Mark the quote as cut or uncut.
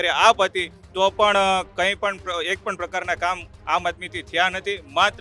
uncut